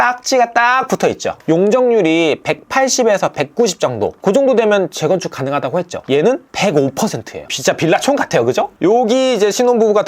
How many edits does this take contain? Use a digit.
2